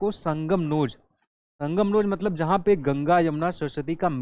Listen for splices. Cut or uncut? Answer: uncut